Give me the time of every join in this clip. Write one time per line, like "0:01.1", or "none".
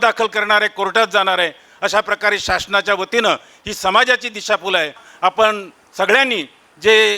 0:05.0